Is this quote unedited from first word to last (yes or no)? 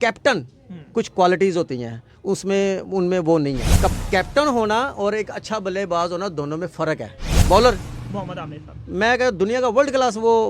no